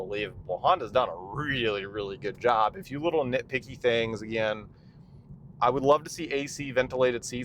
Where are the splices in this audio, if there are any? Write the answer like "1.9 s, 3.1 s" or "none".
2.8 s